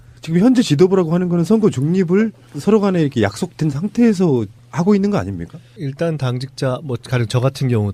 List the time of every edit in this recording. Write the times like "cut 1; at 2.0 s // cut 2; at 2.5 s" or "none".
none